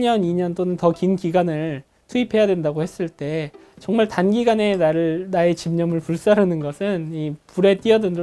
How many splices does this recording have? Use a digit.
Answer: 0